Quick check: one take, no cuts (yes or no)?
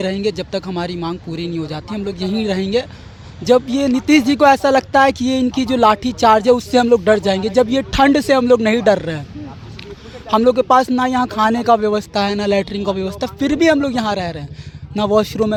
yes